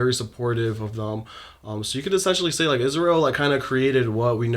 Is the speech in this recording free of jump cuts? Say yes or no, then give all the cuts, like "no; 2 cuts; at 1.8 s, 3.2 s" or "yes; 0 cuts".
yes; 0 cuts